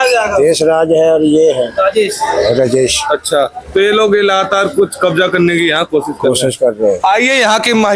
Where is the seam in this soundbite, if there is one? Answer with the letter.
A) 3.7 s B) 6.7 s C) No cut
C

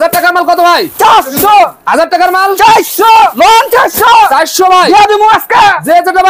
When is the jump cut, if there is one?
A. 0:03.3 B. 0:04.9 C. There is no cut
A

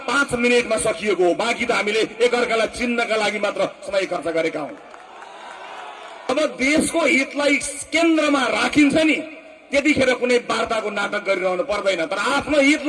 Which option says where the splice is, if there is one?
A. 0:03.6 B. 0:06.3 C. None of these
B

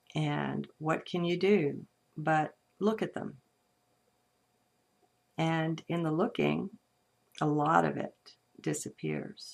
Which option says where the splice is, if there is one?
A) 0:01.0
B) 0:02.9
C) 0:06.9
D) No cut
A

